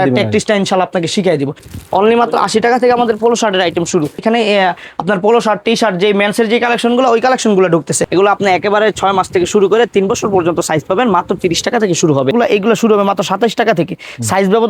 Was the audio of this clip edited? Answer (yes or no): yes